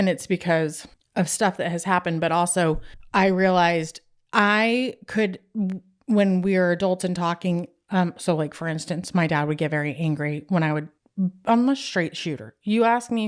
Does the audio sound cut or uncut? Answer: uncut